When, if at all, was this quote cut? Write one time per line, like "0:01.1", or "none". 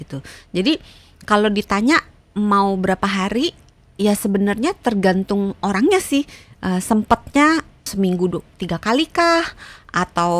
0:07.8